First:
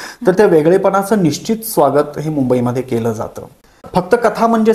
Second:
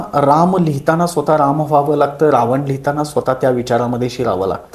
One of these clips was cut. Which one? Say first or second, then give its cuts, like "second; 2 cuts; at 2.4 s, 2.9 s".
first; 1 cut; at 3.8 s